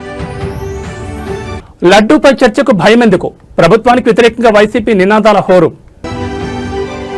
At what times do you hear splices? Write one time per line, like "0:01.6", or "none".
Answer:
0:06.0